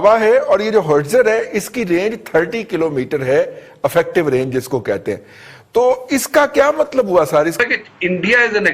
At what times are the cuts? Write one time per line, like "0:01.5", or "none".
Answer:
0:07.6